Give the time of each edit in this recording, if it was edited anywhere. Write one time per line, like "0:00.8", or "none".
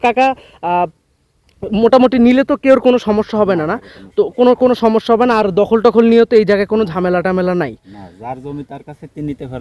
none